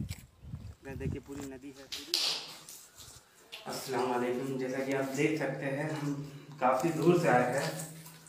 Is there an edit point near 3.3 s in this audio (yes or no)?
no